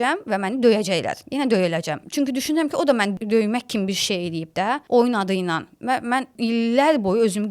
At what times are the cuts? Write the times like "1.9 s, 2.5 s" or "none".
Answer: 2.0 s, 3.1 s, 4.8 s, 6.3 s